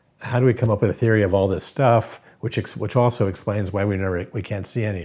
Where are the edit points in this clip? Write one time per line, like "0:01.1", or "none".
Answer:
none